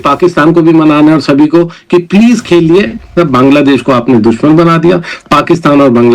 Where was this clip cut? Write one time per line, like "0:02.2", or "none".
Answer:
0:03.1